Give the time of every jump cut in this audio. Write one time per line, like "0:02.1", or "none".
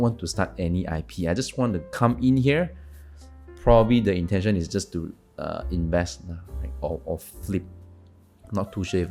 none